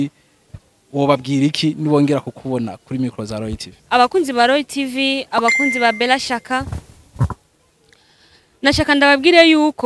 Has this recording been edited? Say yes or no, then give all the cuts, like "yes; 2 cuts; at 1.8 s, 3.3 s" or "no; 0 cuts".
yes; 1 cut; at 3.7 s